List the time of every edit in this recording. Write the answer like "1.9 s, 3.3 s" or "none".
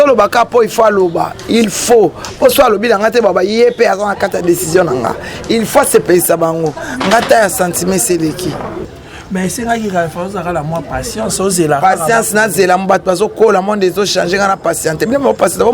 8.9 s

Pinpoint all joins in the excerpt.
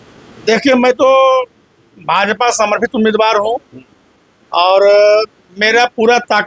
none

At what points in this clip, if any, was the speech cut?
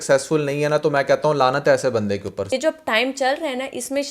2.5 s

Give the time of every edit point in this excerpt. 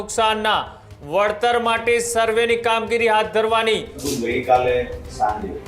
4.0 s

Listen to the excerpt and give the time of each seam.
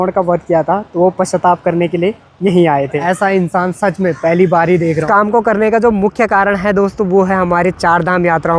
3.0 s, 5.0 s

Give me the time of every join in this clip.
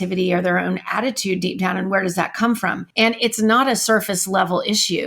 2.8 s

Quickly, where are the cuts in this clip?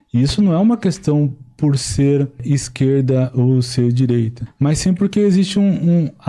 2.4 s, 4.4 s

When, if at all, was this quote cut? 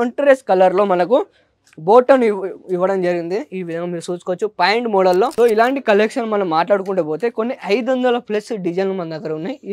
5.3 s

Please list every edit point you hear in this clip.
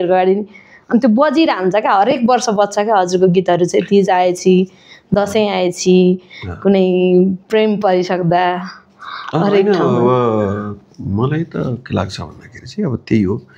none

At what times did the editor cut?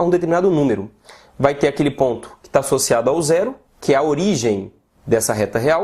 2.2 s

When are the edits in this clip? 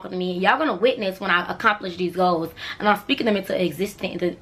none

